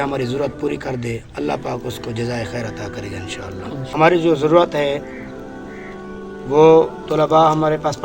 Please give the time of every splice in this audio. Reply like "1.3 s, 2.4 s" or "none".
3.9 s